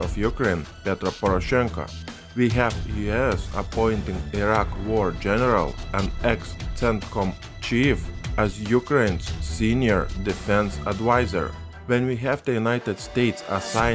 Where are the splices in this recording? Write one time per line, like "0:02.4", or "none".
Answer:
none